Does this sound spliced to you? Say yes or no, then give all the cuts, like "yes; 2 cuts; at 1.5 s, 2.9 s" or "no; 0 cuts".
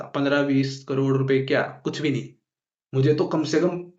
no; 0 cuts